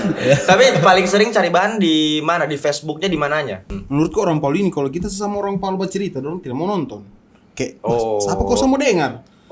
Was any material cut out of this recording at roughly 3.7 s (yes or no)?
yes